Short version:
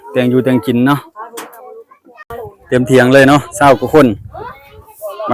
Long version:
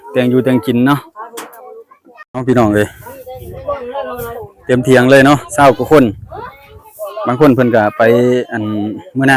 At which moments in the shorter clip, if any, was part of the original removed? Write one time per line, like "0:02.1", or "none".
0:02.3